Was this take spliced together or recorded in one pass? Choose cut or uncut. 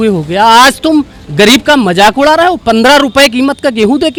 uncut